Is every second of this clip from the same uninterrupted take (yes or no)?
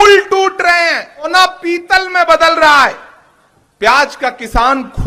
no